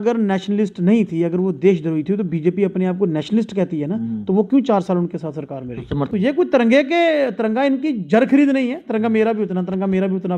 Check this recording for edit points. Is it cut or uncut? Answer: cut